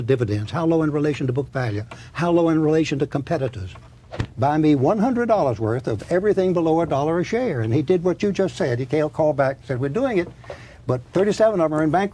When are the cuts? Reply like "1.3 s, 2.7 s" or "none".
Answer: 4.2 s